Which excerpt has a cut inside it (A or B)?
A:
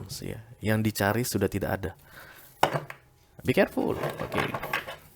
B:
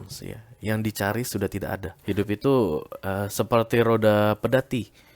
B